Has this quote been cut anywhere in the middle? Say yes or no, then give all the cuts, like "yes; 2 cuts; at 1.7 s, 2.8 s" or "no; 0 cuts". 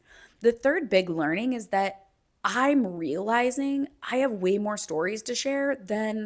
no; 0 cuts